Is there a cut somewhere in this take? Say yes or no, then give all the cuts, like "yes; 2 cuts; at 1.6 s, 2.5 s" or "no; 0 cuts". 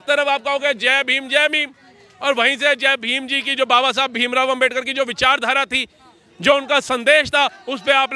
no; 0 cuts